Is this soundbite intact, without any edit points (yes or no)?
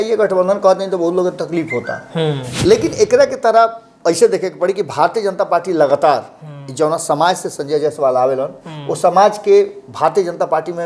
no